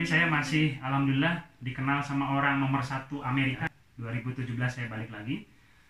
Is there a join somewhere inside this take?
yes; 1 cut; at 3.7 s

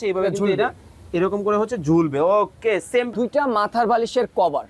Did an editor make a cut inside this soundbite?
yes; 1 cut; at 3.1 s

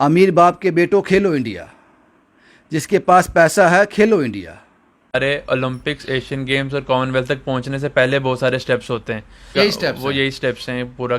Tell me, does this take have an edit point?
yes; 2 cuts; at 5.1 s, 9.5 s

